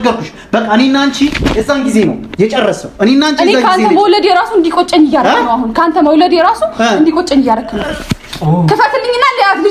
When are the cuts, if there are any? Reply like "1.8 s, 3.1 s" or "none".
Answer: none

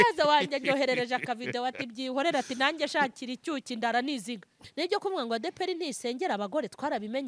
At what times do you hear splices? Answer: 4.6 s

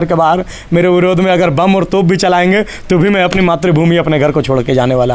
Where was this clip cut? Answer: none

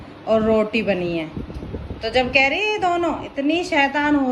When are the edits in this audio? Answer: none

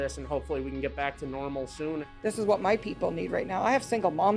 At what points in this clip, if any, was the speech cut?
2.1 s

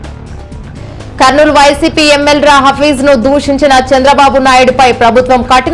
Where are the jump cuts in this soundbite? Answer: 1.2 s

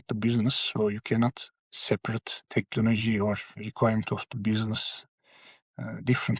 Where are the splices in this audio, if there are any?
2.4 s, 3.6 s

